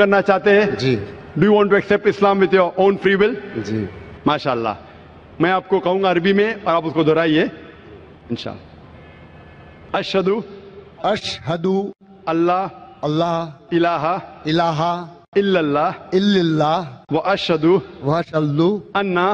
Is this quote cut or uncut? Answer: uncut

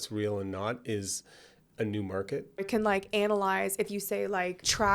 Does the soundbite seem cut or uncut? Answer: cut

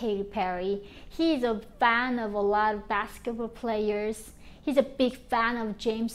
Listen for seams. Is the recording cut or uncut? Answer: uncut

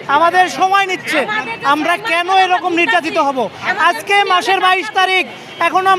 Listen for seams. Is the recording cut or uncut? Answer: uncut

